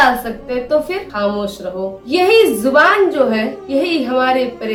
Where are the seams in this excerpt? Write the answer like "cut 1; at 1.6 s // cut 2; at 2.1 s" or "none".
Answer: none